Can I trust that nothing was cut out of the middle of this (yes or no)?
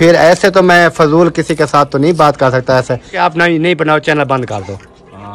no